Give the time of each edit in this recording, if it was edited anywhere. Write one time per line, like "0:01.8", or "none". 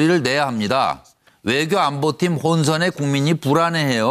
0:01.6